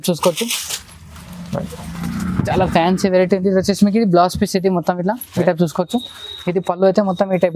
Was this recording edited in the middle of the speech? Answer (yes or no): no